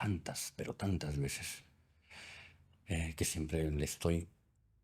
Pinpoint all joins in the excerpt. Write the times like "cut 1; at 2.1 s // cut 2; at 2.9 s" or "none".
none

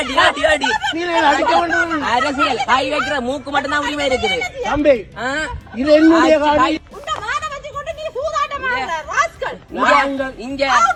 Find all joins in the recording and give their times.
none

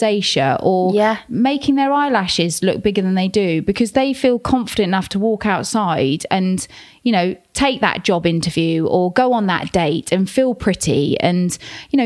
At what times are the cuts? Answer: none

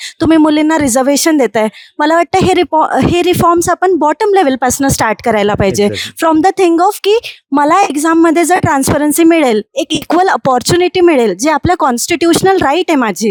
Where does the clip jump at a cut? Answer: none

